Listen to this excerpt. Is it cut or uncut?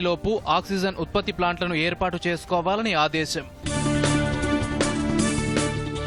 uncut